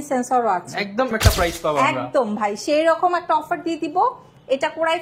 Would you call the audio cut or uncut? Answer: cut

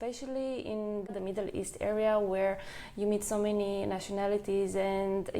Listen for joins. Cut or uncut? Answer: uncut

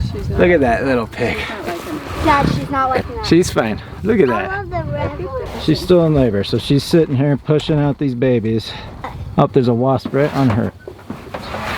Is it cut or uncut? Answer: cut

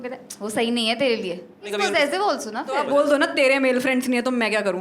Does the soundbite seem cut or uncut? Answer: cut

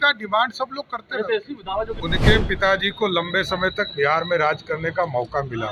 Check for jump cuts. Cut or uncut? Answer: cut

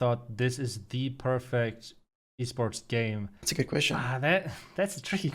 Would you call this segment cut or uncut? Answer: cut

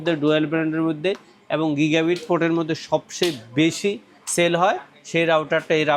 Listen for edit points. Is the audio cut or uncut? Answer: uncut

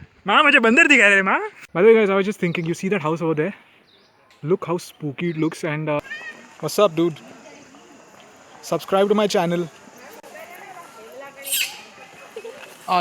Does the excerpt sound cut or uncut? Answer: cut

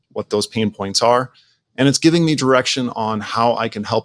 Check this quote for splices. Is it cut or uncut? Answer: uncut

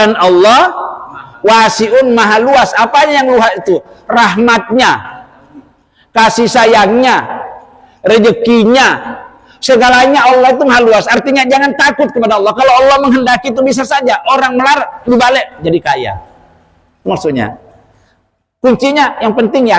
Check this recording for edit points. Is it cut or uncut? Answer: uncut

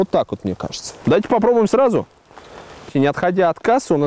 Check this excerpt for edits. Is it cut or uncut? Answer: cut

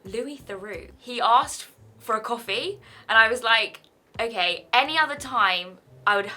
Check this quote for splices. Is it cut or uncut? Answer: cut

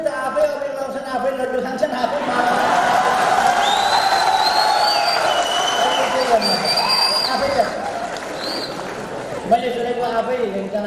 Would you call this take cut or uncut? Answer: uncut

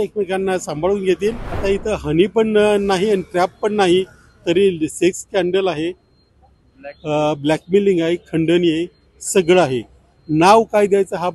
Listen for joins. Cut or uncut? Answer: cut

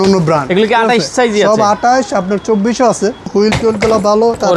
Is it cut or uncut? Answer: cut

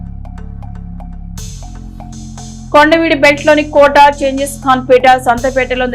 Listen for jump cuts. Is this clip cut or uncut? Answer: uncut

